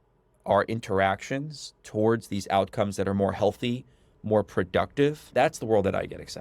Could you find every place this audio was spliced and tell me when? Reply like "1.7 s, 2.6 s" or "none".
5.3 s